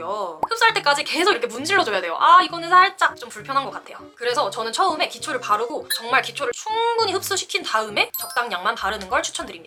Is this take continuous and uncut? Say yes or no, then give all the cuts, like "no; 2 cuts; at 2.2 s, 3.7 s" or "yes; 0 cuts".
yes; 0 cuts